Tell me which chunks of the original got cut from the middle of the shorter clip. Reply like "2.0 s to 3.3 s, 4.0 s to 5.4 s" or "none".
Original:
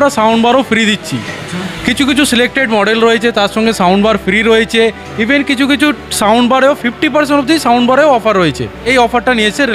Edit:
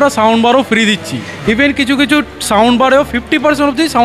1.3 s to 5.0 s